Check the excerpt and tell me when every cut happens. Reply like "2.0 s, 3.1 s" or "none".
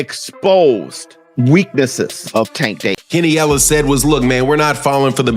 3.0 s